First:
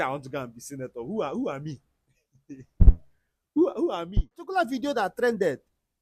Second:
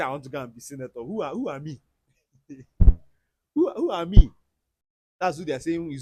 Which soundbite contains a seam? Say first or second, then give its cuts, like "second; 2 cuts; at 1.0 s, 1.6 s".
first; 1 cut; at 4.3 s